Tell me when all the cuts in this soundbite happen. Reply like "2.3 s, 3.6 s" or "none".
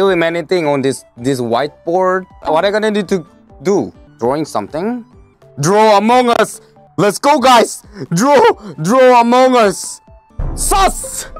5.3 s